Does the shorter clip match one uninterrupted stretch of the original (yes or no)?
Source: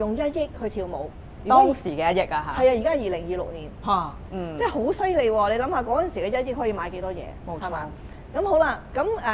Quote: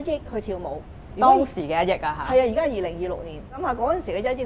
no